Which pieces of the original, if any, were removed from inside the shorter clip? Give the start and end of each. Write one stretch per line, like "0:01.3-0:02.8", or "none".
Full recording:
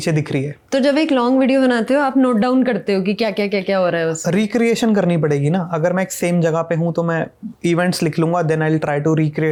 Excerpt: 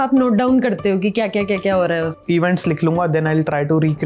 0:04.2-0:07.5